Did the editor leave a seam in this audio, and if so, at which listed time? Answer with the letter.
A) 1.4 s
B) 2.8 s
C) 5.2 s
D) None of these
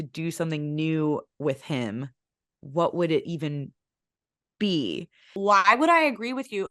C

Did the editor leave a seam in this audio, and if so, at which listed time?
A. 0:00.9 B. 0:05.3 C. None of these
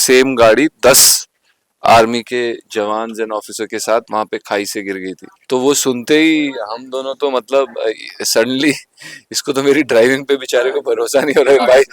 B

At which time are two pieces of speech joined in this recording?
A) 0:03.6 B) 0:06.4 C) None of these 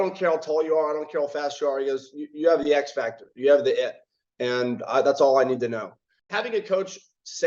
B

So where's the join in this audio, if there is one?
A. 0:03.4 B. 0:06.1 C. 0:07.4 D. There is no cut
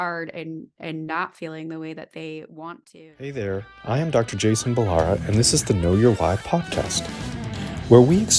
A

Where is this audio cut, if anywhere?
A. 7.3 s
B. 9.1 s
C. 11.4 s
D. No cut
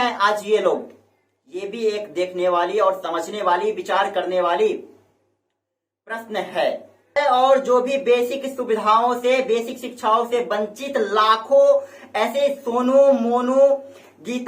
A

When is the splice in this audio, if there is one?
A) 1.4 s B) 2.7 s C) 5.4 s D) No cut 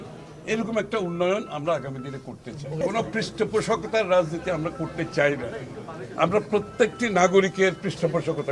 B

